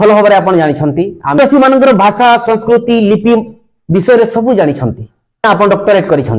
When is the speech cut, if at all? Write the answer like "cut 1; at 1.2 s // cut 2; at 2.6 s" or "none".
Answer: cut 1; at 1.4 s // cut 2; at 5.4 s